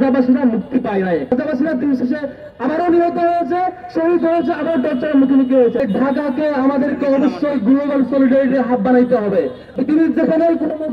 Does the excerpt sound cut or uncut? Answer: cut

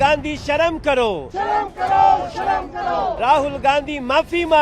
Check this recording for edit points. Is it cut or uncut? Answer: cut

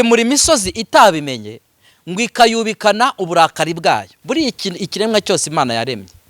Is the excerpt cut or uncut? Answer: cut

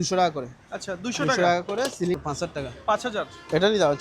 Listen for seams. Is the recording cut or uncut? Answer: cut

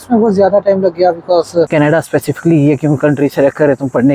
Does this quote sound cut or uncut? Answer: cut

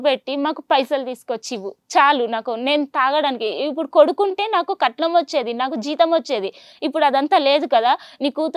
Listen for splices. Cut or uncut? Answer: uncut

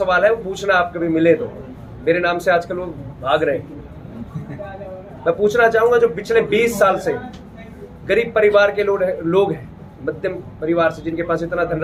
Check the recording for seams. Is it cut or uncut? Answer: uncut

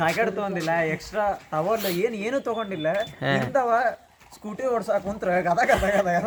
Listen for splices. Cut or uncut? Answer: uncut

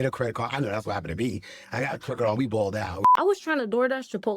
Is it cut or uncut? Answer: cut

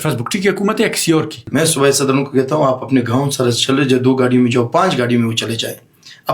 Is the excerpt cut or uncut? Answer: cut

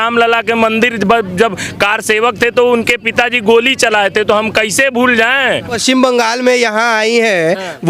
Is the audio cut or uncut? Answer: cut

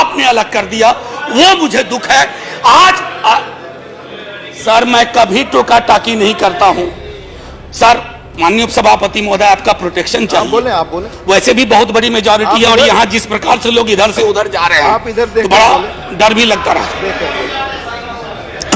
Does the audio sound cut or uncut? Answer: uncut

